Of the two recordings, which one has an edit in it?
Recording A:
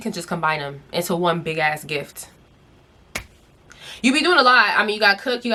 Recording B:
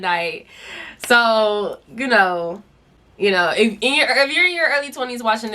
B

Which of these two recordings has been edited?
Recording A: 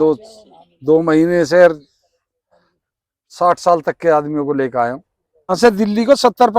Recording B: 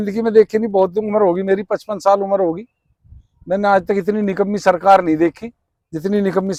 A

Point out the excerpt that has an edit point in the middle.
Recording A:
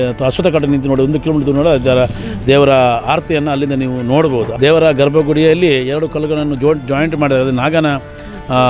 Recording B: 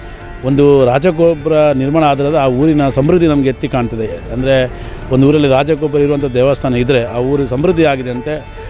A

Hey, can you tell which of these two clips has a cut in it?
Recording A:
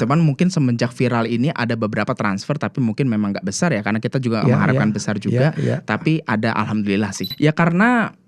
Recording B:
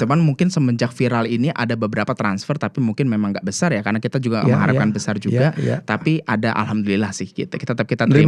A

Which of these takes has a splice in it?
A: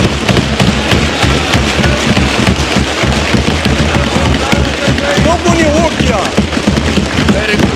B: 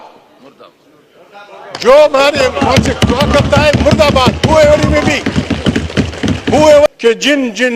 B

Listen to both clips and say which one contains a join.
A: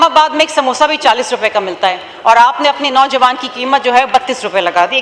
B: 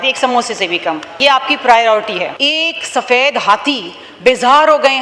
B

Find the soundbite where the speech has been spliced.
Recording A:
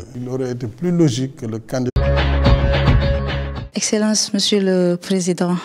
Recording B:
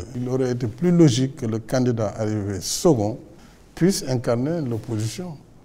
B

